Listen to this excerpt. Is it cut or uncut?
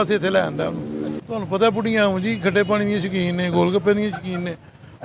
cut